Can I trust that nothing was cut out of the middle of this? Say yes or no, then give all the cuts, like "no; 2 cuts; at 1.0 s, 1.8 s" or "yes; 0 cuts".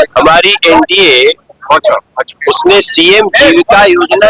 yes; 0 cuts